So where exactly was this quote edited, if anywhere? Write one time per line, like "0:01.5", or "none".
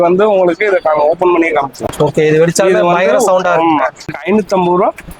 0:01.8
0:04.1